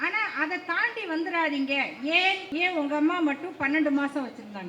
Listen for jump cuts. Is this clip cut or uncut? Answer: cut